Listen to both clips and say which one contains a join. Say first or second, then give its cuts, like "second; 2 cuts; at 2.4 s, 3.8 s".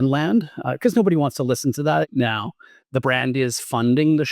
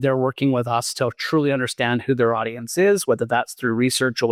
first; 1 cut; at 2.0 s